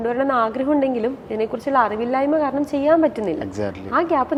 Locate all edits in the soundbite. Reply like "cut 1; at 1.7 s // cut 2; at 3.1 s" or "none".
none